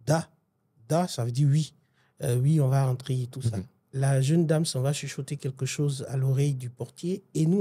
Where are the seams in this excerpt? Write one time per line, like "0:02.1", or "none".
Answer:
0:03.8